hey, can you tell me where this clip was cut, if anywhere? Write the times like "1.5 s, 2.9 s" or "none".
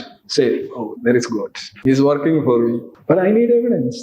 1.7 s, 2.9 s